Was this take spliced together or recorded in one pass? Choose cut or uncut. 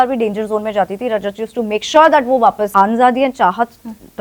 cut